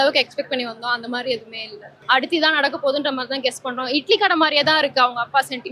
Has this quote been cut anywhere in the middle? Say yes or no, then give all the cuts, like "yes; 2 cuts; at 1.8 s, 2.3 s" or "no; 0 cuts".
yes; 1 cut; at 1.9 s